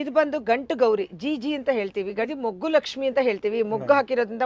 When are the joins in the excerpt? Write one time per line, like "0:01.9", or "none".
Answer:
0:02.3